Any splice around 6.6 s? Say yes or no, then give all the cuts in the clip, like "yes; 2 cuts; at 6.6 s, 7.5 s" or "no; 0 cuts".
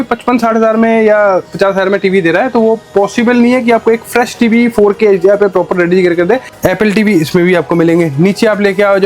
yes; 1 cut; at 6.6 s